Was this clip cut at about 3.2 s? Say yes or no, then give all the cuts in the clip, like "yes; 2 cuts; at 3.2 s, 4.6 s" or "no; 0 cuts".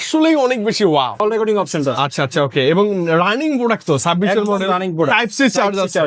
no; 1 cut; at 1.2 s